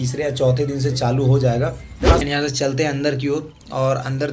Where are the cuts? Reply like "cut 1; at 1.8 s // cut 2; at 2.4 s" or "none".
cut 1; at 2.2 s